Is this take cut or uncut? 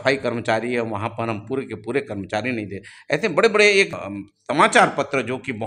uncut